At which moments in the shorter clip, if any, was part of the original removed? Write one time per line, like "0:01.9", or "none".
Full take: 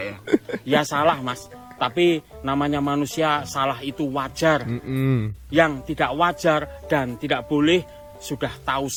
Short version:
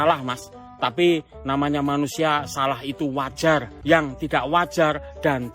0:03.7